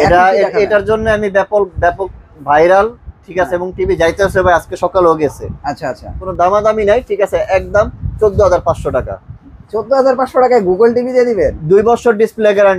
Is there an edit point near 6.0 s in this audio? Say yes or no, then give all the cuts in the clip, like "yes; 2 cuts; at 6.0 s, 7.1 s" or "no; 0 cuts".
yes; 1 cut; at 6.0 s